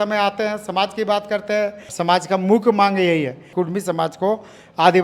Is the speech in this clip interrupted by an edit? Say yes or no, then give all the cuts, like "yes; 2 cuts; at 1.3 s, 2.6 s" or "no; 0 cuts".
yes; 1 cut; at 1.9 s